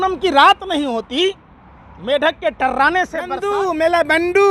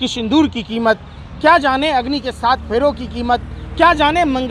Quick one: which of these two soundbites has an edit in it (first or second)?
first